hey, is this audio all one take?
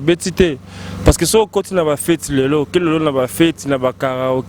yes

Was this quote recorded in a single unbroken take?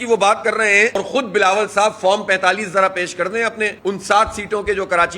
no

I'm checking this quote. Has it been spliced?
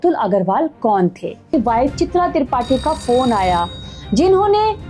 yes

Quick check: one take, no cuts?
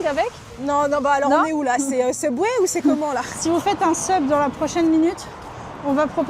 no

